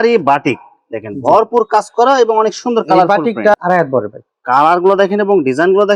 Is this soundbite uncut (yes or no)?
no